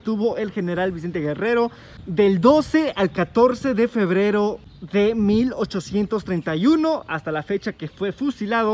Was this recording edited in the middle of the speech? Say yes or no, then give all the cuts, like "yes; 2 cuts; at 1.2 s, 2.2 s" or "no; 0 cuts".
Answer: no; 0 cuts